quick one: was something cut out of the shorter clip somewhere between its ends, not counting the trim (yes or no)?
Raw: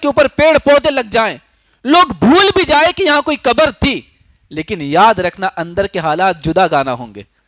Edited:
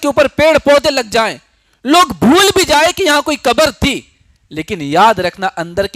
no